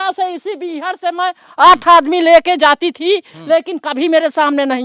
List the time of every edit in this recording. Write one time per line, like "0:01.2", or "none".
none